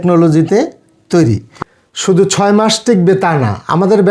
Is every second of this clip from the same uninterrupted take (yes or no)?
no